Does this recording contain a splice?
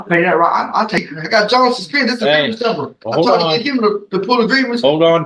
yes; 1 cut; at 1.0 s

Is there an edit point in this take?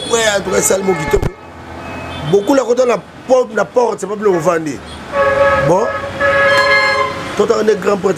no; 0 cuts

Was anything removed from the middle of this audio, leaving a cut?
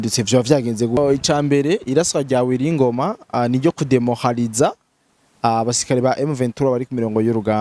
yes; 1 cut; at 1.0 s

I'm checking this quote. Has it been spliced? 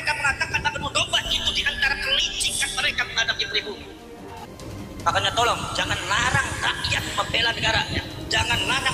yes; 1 cut; at 4.5 s

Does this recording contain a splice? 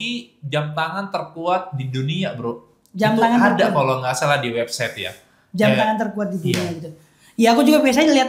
no; 0 cuts

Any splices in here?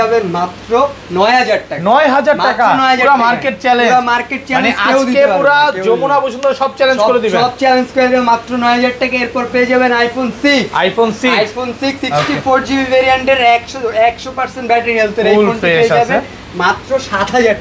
no; 0 cuts

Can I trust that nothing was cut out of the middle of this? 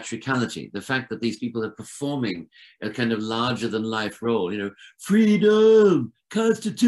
yes; 0 cuts

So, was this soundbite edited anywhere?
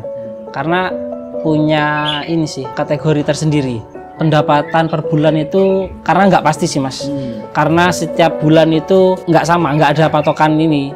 yes; 1 cut; at 4.1 s

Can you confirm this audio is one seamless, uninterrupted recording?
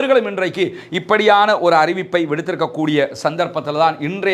yes; 0 cuts

